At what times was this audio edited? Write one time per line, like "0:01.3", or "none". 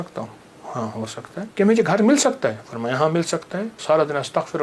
0:01.5
0:03.7